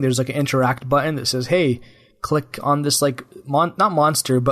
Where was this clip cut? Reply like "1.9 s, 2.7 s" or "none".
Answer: none